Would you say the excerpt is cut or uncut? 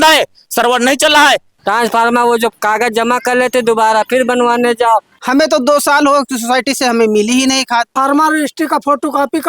cut